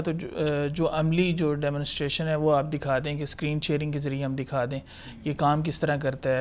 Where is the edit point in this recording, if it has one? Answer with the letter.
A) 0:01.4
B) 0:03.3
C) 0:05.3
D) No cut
D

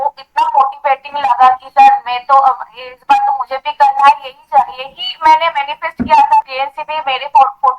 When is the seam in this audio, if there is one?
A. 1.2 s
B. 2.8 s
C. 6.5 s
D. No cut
C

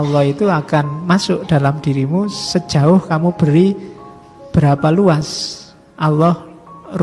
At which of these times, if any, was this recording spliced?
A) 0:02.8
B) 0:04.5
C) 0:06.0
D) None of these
D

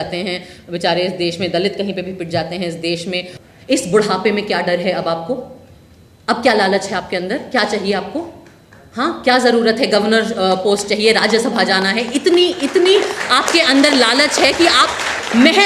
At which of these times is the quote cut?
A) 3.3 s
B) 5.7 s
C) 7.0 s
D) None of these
A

